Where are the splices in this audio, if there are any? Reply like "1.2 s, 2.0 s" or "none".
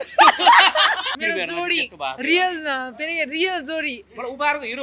1.2 s